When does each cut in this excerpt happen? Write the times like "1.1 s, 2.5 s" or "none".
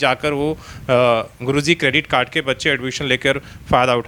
none